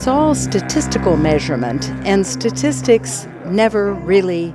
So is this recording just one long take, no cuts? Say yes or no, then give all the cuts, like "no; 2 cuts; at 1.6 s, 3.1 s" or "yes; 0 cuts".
yes; 0 cuts